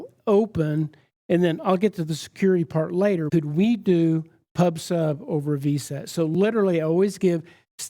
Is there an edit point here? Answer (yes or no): yes